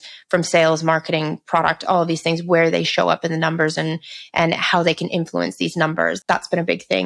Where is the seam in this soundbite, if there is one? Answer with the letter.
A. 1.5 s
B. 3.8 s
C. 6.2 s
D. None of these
C